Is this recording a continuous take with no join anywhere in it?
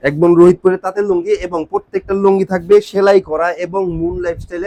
yes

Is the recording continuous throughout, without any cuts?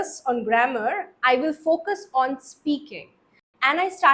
yes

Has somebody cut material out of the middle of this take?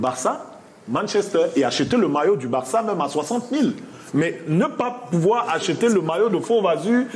no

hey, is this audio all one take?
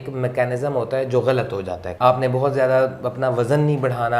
no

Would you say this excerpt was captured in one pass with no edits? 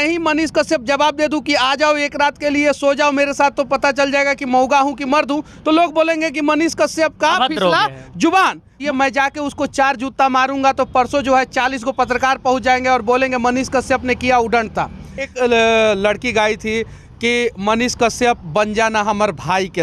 no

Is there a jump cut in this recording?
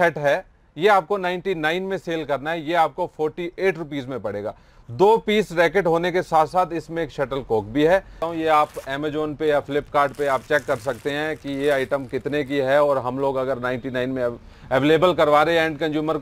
yes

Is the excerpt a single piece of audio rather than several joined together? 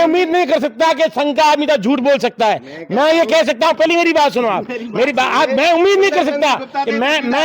yes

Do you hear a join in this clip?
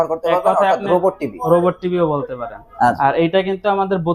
yes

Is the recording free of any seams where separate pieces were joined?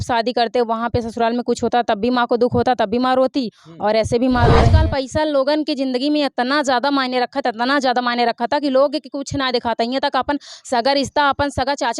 no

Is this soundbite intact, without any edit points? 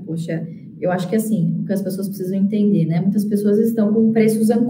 yes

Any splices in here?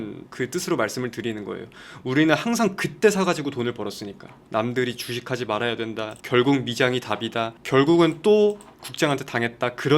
yes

